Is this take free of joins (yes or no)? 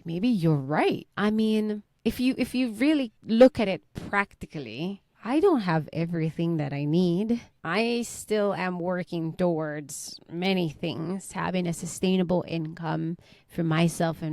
no